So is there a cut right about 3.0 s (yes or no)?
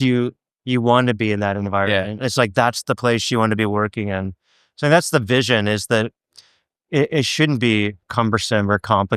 no